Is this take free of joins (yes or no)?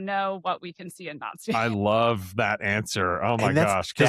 yes